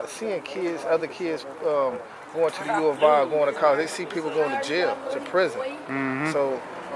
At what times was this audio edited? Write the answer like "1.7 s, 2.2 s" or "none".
none